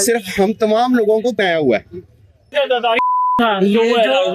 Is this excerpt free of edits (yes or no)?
no